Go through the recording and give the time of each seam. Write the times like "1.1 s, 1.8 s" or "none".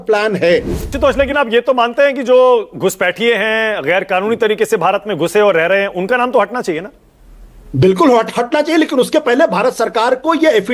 0.9 s